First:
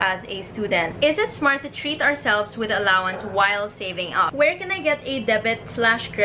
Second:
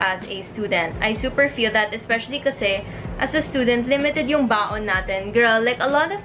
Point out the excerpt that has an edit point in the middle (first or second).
first